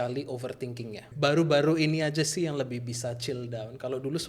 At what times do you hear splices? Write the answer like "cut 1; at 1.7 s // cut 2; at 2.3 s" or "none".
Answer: cut 1; at 1.1 s

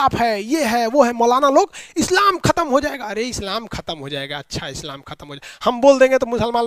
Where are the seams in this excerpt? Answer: none

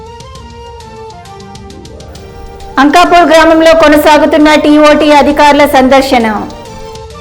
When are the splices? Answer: cut 1; at 1.1 s

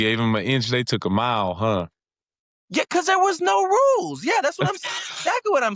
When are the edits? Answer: none

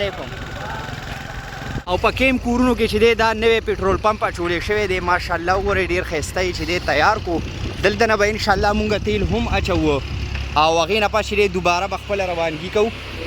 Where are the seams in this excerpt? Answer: cut 1; at 1.8 s

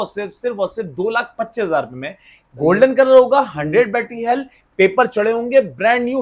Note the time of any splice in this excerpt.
none

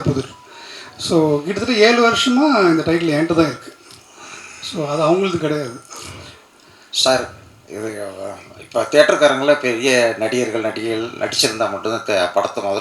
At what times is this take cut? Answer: none

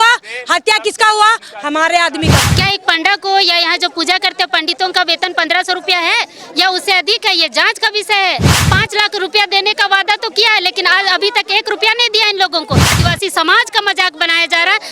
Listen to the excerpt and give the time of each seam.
cut 1; at 2.4 s // cut 2; at 8.5 s // cut 3; at 13.0 s

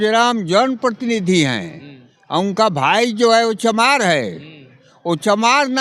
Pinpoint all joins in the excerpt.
none

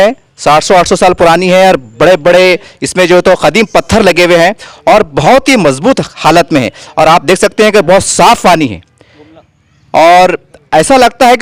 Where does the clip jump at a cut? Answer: none

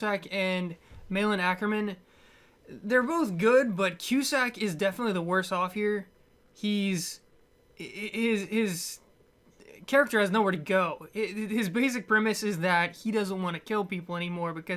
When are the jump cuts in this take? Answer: cut 1; at 13.4 s

